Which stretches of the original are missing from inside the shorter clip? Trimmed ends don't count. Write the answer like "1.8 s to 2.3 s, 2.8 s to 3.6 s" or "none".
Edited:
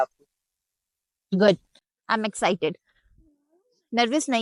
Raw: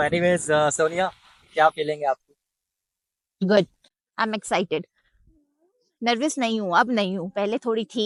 none